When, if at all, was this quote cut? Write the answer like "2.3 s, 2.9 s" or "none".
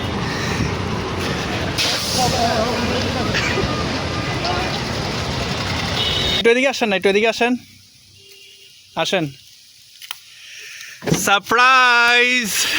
6.4 s